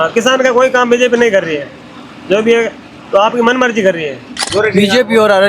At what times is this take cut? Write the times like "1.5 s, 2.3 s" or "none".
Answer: 4.4 s